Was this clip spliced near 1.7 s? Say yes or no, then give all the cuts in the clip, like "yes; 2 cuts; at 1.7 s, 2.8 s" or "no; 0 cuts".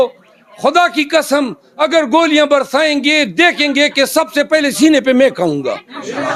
no; 0 cuts